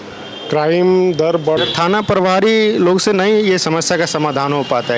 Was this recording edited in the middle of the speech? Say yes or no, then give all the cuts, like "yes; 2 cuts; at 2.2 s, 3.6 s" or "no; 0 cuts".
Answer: yes; 1 cut; at 1.6 s